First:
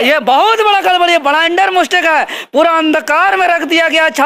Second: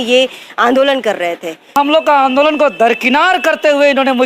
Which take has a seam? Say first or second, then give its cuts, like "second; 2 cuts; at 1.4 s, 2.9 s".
second; 1 cut; at 1.7 s